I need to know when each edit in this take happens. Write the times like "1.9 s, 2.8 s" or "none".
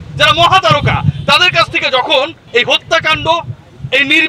2.4 s